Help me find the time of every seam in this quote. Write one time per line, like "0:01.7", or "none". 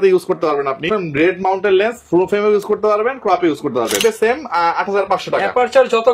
0:00.9
0:04.0